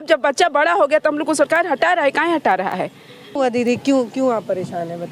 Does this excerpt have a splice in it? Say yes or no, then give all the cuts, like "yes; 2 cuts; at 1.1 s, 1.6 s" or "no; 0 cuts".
yes; 1 cut; at 3.4 s